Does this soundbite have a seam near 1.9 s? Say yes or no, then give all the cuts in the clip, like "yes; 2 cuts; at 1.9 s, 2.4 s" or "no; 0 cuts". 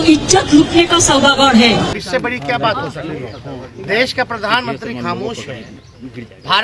yes; 1 cut; at 1.9 s